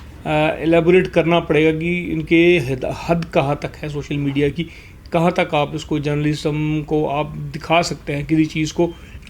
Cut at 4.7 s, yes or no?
no